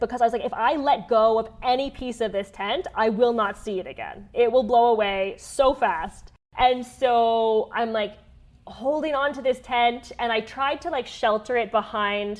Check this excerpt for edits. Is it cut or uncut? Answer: uncut